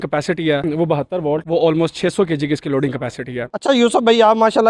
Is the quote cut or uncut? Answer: uncut